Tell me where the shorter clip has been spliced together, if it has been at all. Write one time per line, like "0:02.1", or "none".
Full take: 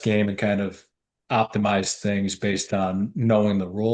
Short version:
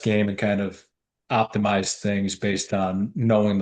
none